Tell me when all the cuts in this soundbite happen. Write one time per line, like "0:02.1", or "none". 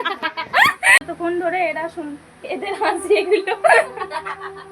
0:01.1